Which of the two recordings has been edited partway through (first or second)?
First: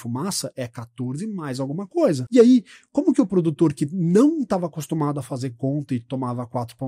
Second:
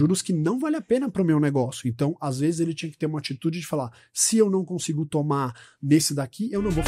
first